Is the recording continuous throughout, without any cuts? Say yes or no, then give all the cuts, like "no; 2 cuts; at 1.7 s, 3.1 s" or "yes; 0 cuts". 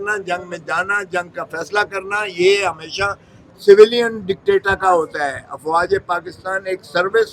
yes; 0 cuts